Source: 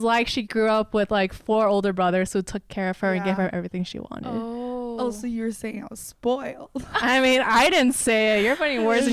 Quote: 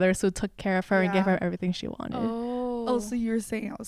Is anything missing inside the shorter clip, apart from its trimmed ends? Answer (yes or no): no